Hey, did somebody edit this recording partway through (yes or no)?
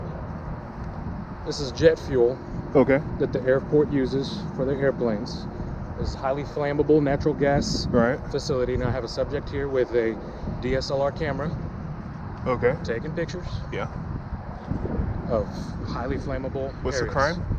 no